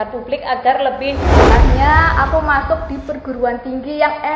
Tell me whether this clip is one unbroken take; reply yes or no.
no